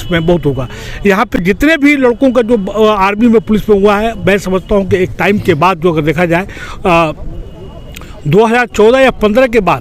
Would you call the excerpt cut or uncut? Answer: uncut